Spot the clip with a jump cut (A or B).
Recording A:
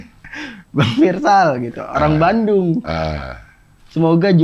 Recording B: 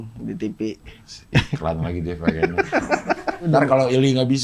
B